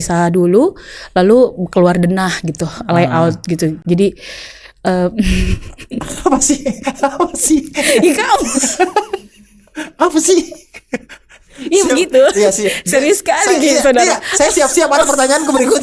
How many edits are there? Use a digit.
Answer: 0